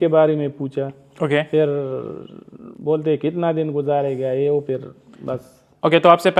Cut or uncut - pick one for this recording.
uncut